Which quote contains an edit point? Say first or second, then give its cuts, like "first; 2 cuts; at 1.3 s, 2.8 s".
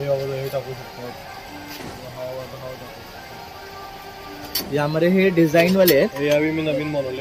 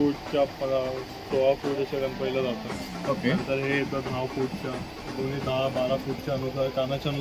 first; 1 cut; at 4.5 s